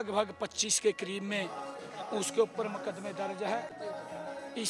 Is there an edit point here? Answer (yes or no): yes